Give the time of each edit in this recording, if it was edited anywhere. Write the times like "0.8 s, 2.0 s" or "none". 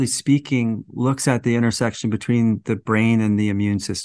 none